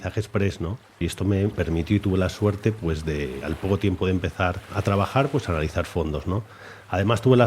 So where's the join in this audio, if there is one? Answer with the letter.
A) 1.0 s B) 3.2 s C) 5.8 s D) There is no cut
A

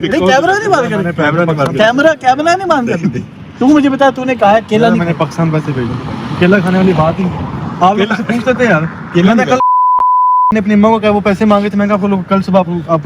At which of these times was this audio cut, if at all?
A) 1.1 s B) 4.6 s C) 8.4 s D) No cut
A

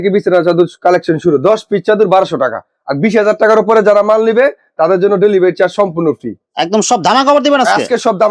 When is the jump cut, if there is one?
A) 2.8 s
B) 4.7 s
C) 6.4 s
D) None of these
D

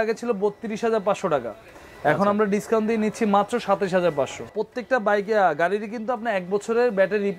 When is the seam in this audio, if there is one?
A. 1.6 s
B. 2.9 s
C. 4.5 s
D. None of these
C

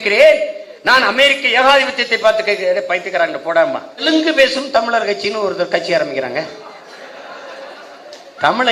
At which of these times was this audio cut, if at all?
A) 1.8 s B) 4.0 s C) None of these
B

